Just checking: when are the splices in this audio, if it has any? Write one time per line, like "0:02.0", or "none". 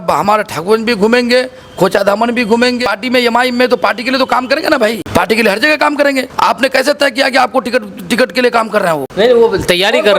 0:02.9
0:05.0
0:06.3
0:09.1